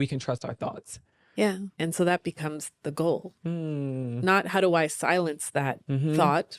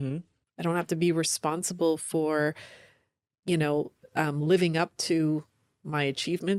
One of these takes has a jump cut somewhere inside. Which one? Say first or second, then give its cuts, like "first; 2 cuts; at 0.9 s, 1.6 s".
first; 2 cuts; at 1.7 s, 3.3 s